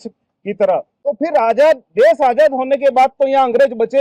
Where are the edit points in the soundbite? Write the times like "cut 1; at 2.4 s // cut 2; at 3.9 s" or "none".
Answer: cut 1; at 0.9 s